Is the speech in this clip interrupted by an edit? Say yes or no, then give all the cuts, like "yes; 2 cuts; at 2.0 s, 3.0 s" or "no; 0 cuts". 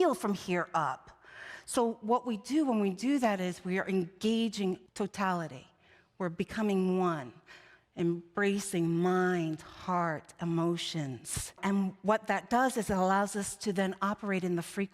yes; 2 cuts; at 4.9 s, 11.6 s